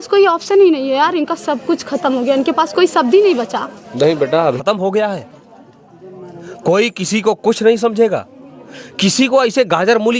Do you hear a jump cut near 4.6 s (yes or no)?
yes